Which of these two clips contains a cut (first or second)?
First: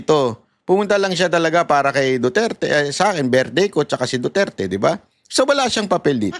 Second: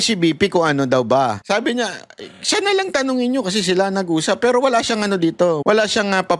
second